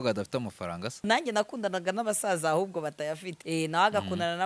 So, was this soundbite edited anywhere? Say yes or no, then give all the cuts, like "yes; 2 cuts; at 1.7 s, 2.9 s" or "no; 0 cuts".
yes; 2 cuts; at 1.1 s, 3.4 s